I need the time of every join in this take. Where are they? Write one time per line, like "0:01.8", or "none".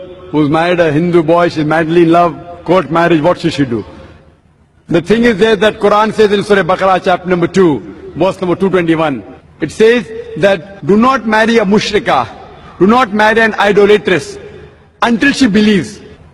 none